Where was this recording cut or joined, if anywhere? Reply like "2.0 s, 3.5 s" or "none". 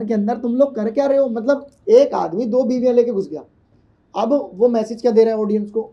none